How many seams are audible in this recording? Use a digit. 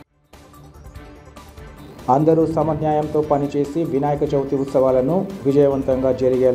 1